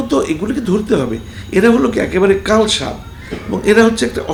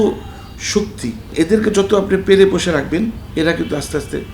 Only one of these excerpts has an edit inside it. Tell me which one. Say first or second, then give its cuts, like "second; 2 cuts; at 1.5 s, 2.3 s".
second; 2 cuts; at 1.3 s, 3.2 s